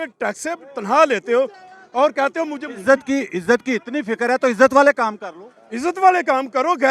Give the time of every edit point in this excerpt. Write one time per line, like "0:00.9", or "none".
none